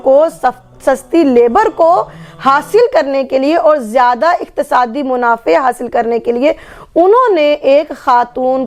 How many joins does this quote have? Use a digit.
0